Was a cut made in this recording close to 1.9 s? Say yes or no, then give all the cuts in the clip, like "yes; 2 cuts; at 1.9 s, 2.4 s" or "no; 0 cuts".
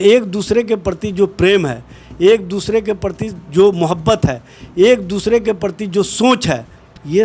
no; 0 cuts